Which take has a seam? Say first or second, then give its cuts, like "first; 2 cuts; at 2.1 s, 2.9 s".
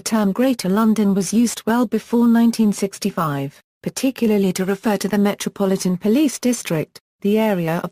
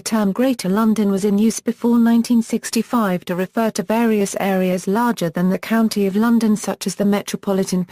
second; 1 cut; at 1.0 s